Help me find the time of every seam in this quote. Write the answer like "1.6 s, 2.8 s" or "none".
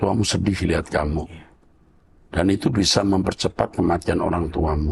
none